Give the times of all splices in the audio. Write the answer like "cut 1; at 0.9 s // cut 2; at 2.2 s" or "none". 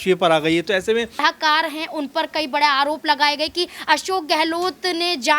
cut 1; at 1.2 s